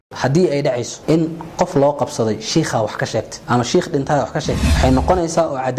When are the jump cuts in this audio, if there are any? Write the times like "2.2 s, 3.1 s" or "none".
0.9 s, 3.4 s, 4.6 s